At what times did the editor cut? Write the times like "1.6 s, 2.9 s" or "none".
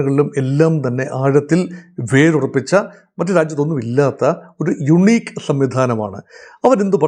none